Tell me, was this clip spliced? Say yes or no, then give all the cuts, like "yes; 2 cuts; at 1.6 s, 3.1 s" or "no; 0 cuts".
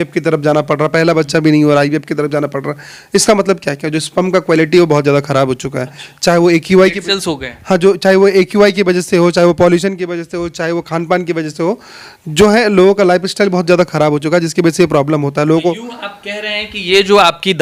no; 0 cuts